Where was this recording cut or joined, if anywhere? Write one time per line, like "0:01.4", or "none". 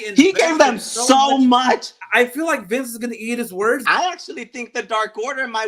0:02.0
0:03.8

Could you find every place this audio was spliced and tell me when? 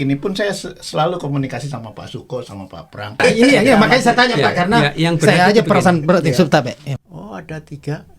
0:03.2
0:06.9

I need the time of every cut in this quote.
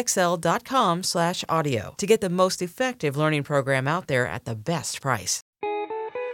0:05.4

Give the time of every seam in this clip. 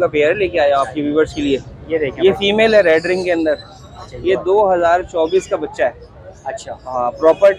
none

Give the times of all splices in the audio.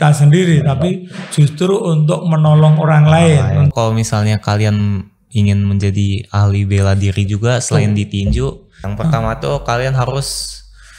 0:03.7
0:08.8

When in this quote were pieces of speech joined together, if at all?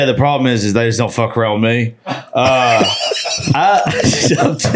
0:03.4

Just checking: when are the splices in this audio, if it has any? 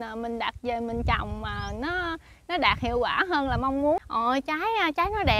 0:04.0

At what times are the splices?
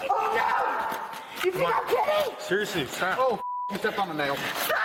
none

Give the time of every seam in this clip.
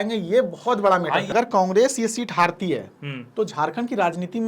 0:01.3

